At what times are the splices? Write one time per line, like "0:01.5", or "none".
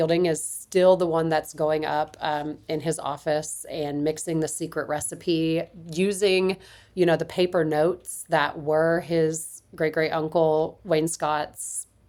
none